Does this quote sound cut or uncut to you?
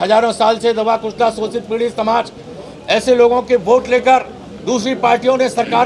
uncut